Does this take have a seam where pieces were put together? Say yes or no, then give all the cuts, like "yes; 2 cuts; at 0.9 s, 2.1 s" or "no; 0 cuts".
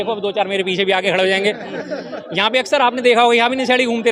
no; 0 cuts